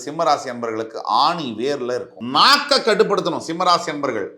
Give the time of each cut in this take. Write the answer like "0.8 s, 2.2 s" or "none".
2.2 s